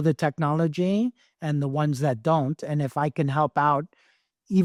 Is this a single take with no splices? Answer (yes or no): yes